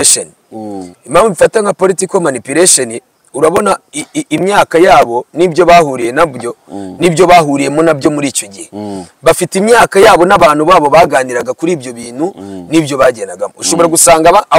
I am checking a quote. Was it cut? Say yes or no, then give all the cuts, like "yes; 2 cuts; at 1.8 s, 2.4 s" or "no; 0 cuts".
no; 0 cuts